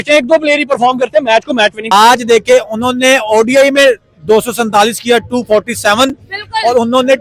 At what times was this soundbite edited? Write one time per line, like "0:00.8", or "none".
0:01.8